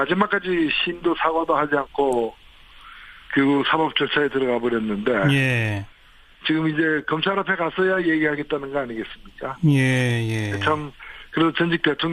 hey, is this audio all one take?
no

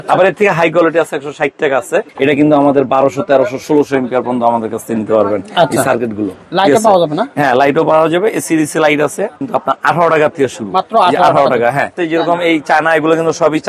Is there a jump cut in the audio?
yes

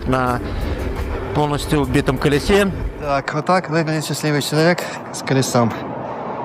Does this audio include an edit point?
yes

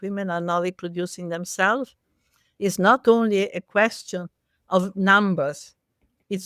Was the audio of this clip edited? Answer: no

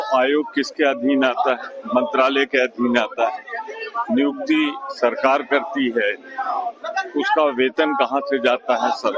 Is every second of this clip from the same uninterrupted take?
no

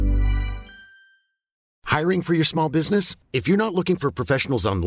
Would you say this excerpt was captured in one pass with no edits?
no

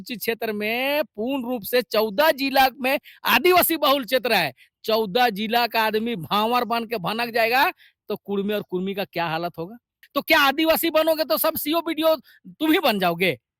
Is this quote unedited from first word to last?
no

